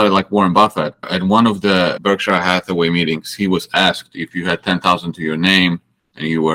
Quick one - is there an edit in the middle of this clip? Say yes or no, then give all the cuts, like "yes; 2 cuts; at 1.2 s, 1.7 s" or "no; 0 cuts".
yes; 2 cuts; at 1.1 s, 2.0 s